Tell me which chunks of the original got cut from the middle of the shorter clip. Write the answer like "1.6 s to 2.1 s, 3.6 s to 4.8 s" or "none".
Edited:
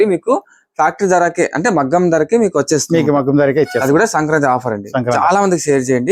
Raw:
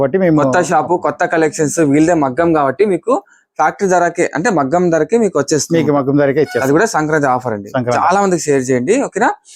none

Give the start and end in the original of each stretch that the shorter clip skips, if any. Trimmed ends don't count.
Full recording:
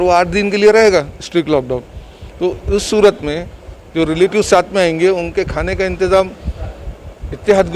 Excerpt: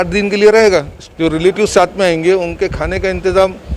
1.2 s to 3.7 s

